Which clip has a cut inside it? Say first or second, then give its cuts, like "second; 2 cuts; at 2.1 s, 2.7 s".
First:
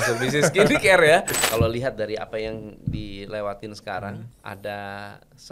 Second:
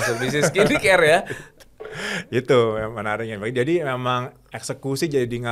first; 2 cuts; at 1.4 s, 4.3 s